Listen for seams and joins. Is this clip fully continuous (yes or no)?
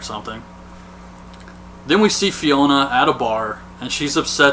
yes